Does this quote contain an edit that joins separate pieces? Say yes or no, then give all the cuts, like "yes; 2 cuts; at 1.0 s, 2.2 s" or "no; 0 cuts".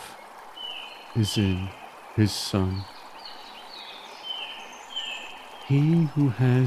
no; 0 cuts